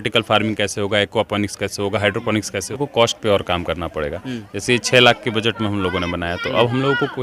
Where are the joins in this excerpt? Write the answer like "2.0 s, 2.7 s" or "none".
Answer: 2.7 s